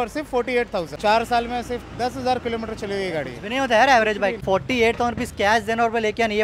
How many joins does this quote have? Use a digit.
2